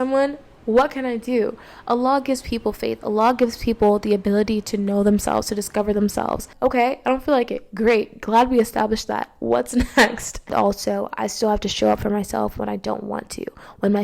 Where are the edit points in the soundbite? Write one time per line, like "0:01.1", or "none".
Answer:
0:06.5
0:10.5